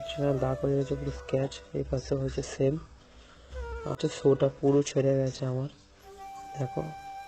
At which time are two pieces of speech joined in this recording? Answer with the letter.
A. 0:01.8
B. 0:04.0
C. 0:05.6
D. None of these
B